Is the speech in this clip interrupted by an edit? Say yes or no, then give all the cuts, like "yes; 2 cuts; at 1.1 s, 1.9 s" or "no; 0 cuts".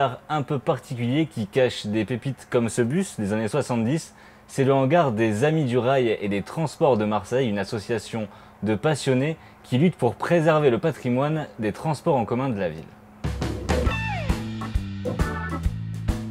yes; 1 cut; at 5.8 s